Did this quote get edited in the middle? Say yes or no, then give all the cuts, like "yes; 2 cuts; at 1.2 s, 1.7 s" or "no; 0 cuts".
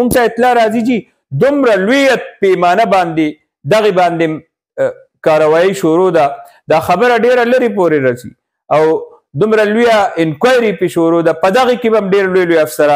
no; 0 cuts